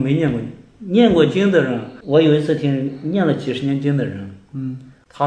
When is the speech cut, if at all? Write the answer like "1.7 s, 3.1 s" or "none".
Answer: 1.9 s